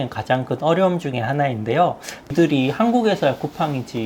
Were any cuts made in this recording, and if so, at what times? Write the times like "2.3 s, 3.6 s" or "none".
2.3 s